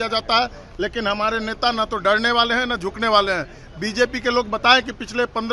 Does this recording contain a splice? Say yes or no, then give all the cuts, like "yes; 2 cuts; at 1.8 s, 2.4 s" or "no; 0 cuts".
no; 0 cuts